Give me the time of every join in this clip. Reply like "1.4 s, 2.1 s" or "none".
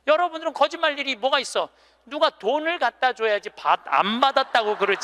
none